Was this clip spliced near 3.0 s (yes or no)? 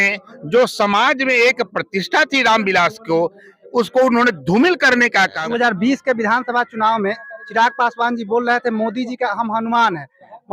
no